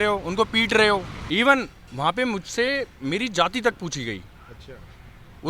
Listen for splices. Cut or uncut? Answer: cut